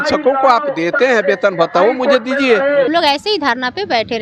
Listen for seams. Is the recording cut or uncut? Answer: cut